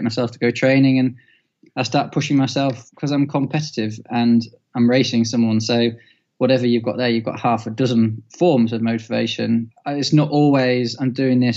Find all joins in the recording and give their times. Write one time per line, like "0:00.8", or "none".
0:09.7